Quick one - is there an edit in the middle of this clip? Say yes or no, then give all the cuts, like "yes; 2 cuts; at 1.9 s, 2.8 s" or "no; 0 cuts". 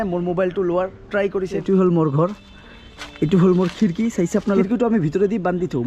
yes; 2 cuts; at 1.6 s, 4.7 s